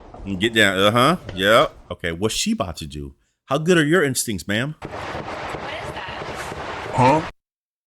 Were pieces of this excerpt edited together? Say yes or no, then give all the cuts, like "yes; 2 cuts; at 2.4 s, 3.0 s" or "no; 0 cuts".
yes; 1 cut; at 1.9 s